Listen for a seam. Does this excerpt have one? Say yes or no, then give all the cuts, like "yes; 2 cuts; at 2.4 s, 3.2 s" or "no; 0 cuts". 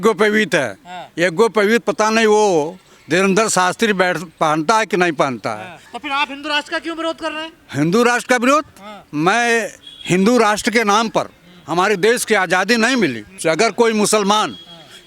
yes; 2 cuts; at 5.9 s, 13.4 s